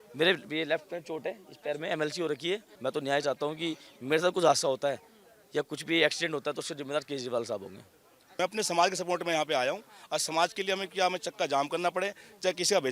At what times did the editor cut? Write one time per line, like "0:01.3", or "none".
0:02.7
0:08.4